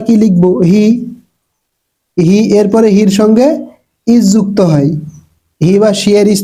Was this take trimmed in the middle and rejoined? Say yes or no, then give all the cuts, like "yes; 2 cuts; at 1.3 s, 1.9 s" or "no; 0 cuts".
no; 0 cuts